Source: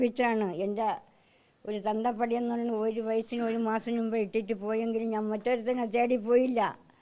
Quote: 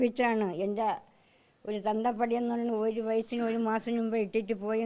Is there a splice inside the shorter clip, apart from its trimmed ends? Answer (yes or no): no